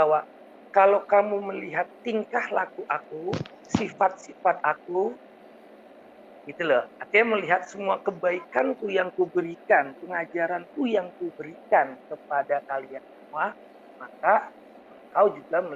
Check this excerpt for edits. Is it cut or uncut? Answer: uncut